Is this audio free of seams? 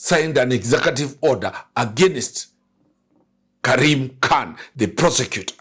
no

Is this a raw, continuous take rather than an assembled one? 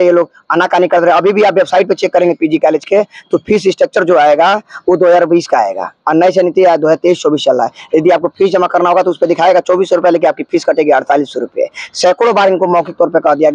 yes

